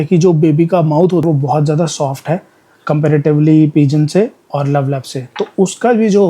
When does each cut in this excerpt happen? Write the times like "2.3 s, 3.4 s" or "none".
1.2 s